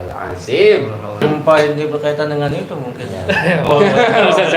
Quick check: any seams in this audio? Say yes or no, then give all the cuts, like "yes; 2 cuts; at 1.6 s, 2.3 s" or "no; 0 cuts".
yes; 1 cut; at 1.2 s